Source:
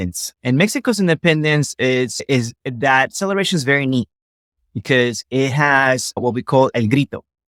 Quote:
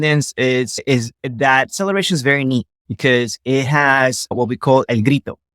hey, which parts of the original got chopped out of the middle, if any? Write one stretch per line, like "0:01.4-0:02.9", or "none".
0:04.2-0:04.7